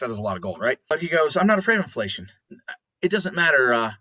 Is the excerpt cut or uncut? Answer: cut